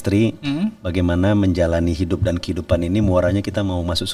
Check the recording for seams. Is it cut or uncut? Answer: uncut